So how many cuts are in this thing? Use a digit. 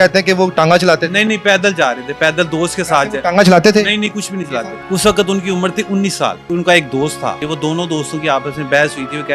3